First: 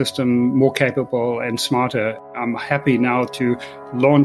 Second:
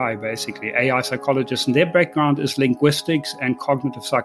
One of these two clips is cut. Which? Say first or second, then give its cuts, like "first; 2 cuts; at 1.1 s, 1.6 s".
first; 1 cut; at 2.2 s